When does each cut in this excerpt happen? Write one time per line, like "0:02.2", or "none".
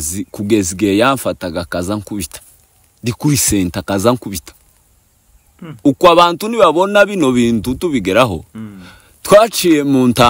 none